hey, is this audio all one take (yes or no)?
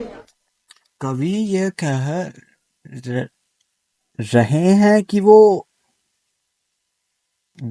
yes